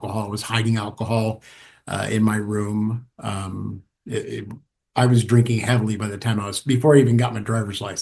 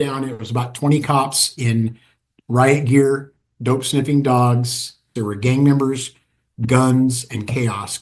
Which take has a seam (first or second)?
second